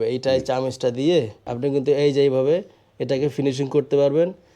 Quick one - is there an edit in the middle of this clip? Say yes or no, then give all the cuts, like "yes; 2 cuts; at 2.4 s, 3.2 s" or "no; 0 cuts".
yes; 1 cut; at 1.4 s